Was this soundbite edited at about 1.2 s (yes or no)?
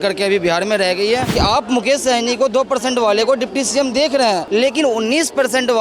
yes